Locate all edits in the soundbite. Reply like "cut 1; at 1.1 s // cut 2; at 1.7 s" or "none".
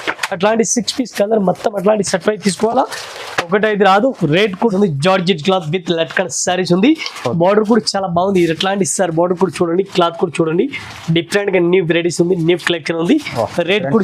cut 1; at 4.7 s